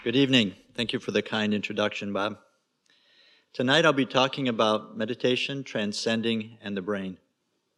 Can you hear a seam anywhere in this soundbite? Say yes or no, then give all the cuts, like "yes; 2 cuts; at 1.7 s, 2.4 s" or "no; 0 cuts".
no; 0 cuts